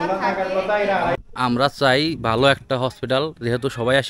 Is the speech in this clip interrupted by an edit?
yes; 1 cut; at 1.2 s

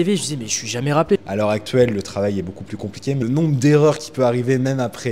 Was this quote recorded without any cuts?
no; 2 cuts; at 1.2 s, 3.2 s

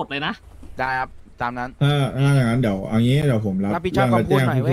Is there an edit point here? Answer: no; 0 cuts

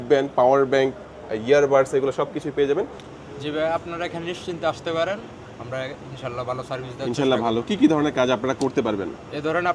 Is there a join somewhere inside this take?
yes; 1 cut; at 3.0 s

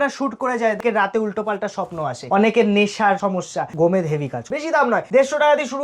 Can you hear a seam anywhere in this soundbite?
yes; 4 cuts; at 0.8 s, 2.2 s, 3.3 s, 4.8 s

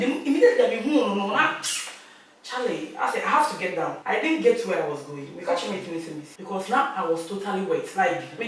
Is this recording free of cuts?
no; 2 cuts; at 4.0 s, 6.3 s

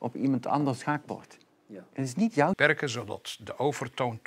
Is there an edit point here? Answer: yes; 1 cut; at 2.6 s

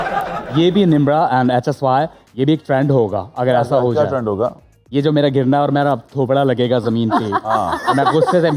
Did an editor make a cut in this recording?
no; 0 cuts

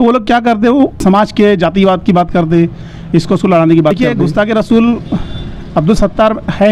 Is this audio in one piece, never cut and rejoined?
no; 2 cuts; at 1.0 s, 4.0 s

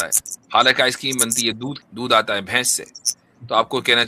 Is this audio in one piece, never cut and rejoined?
no; 1 cut; at 1.8 s

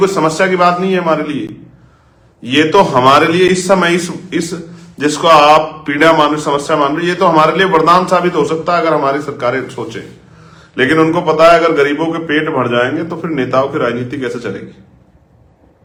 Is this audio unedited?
yes; 0 cuts

